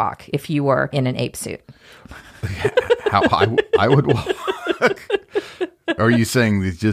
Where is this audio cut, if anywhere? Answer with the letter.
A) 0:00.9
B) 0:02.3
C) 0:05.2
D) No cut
A